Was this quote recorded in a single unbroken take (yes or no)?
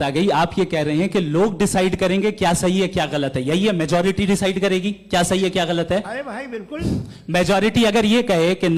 yes